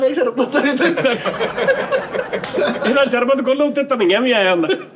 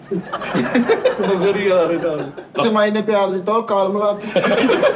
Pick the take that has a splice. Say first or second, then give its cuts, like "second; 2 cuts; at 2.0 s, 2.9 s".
second; 1 cut; at 2.6 s